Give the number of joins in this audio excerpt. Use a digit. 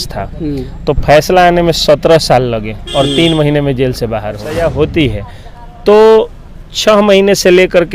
1